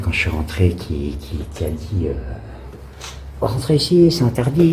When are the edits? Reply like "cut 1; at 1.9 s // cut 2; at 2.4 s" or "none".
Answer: none